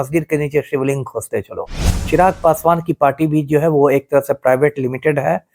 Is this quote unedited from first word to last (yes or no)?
no